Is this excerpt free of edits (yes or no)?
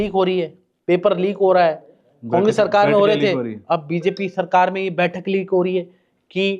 yes